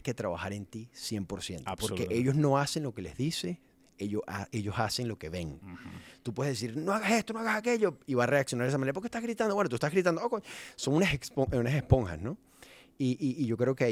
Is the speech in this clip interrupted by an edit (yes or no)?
no